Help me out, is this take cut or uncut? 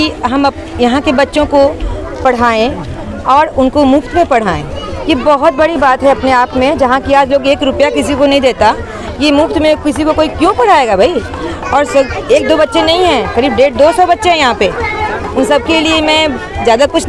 uncut